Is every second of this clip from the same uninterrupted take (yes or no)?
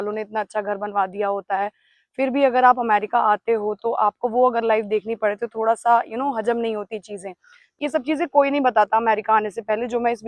no